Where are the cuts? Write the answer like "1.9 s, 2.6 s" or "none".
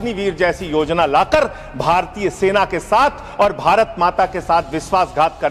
none